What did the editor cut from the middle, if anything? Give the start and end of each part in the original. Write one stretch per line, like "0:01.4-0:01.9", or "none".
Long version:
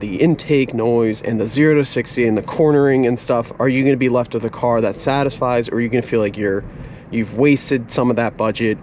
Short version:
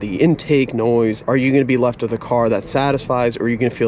0:01.2-0:03.5